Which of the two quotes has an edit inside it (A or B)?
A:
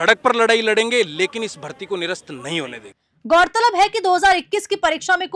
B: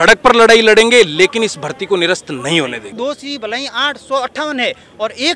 B